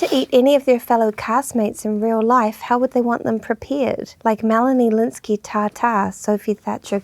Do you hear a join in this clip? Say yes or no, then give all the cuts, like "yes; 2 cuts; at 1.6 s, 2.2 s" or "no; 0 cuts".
yes; 1 cut; at 4.1 s